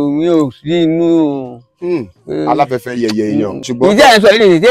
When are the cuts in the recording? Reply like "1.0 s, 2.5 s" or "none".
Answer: 3.7 s

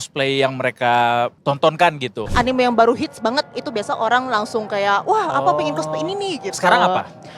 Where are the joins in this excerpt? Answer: 1.4 s, 2.2 s

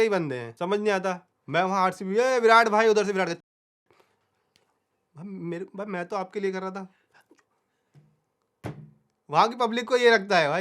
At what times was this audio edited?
none

